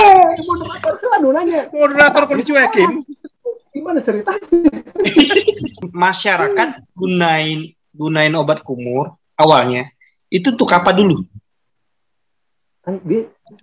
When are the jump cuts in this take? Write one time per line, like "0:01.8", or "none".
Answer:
0:05.8